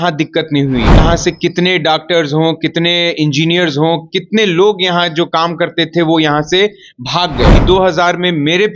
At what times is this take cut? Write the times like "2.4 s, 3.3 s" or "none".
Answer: 1.0 s, 7.6 s